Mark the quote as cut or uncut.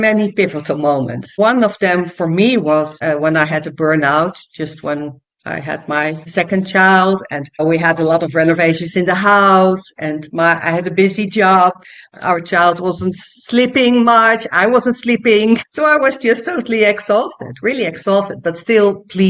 cut